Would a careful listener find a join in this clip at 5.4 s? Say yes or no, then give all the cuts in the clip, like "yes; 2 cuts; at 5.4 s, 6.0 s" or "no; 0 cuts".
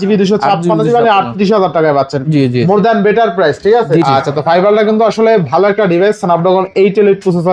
no; 1 cut; at 4.0 s